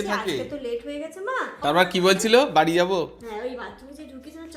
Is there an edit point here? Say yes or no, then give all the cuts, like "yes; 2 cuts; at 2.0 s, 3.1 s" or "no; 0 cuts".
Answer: yes; 1 cut; at 1.5 s